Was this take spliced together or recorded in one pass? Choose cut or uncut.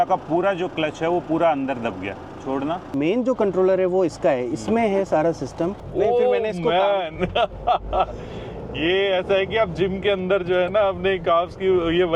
cut